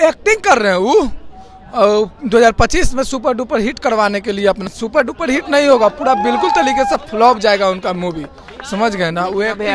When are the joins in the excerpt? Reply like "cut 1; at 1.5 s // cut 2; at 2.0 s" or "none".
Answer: none